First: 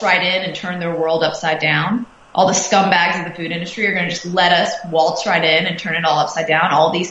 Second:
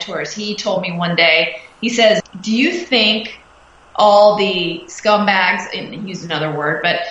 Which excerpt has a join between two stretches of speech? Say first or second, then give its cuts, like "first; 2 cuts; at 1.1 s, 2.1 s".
second; 1 cut; at 2.2 s